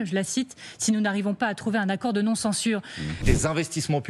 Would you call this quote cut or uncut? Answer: cut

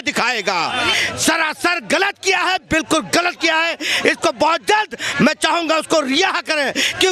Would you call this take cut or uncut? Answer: cut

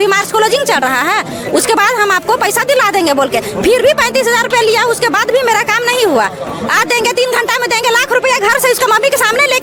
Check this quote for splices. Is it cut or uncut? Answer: uncut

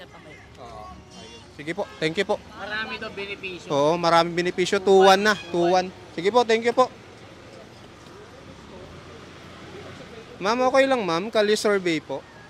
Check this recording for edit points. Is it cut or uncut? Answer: uncut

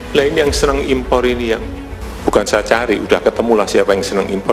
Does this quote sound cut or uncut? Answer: uncut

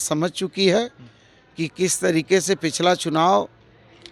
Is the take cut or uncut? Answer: uncut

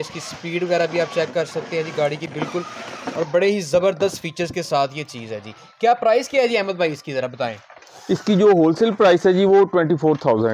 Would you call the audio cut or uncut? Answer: uncut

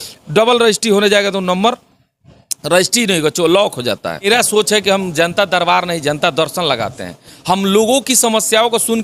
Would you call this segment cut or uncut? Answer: cut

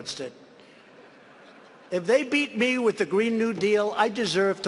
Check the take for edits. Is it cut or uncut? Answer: uncut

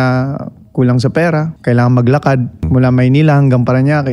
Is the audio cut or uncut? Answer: cut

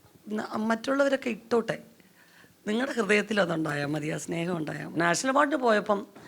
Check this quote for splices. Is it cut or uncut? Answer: cut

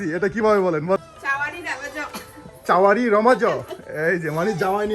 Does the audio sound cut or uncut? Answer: cut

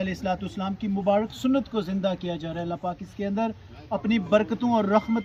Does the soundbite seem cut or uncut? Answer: uncut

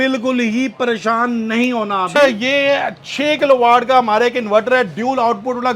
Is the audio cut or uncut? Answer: cut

